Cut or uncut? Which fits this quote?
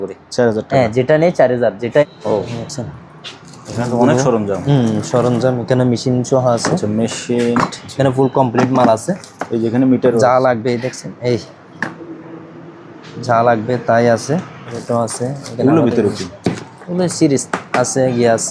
cut